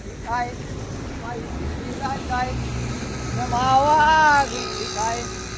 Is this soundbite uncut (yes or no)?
yes